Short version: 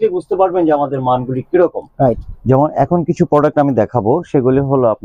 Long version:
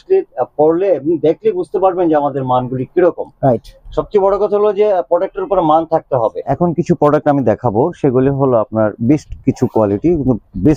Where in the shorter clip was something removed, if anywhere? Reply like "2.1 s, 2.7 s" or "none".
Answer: 2.6 s